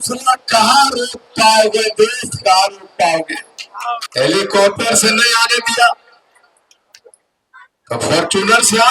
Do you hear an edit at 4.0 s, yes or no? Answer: yes